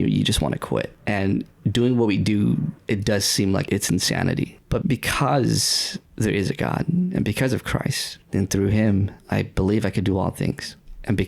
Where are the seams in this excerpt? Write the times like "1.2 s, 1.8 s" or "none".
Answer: 3.6 s, 4.6 s